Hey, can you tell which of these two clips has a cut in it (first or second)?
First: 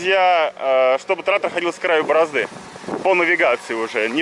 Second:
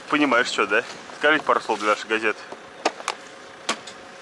second